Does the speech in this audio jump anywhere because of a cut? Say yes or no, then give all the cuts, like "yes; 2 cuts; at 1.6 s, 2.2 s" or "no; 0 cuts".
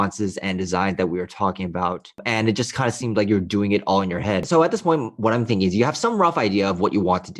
yes; 2 cuts; at 2.2 s, 4.4 s